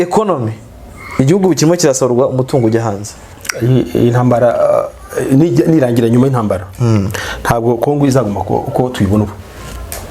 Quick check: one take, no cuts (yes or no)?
yes